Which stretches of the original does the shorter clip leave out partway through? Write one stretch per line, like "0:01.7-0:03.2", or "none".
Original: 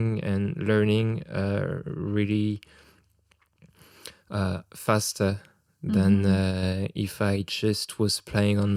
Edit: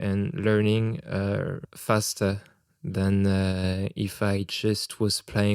0:01.9-0:04.7